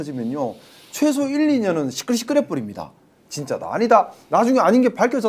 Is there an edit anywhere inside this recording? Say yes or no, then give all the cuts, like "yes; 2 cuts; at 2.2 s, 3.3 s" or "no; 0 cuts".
no; 0 cuts